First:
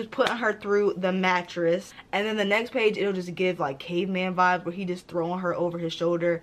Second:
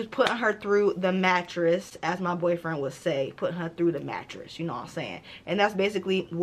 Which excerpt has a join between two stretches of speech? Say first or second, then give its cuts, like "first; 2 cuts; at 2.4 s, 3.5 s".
first; 1 cut; at 1.9 s